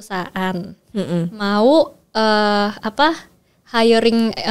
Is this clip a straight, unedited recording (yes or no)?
yes